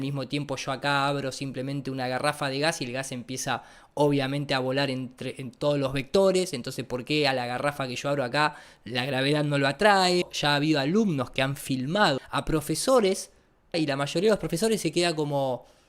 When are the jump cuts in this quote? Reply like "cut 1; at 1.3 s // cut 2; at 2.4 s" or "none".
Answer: cut 1; at 10.3 s // cut 2; at 12.3 s // cut 3; at 13.7 s

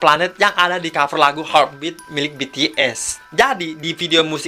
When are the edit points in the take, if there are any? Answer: cut 1; at 3.2 s

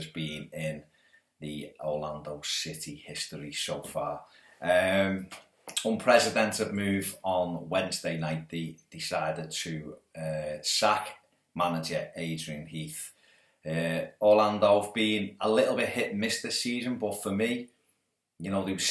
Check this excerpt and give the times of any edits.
cut 1; at 5.6 s

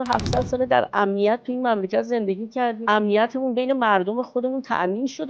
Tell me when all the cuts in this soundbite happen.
cut 1; at 2.8 s

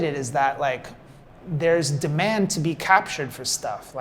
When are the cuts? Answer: none

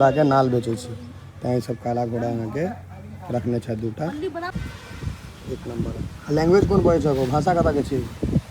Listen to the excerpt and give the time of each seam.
cut 1; at 4.5 s

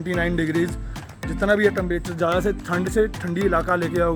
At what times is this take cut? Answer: none

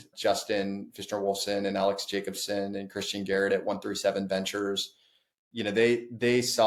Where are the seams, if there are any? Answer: none

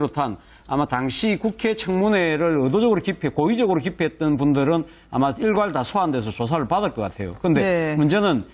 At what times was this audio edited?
cut 1; at 6.5 s

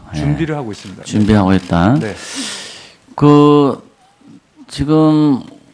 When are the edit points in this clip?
cut 1; at 2.3 s

